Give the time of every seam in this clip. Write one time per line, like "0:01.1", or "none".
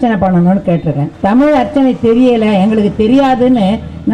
0:01.1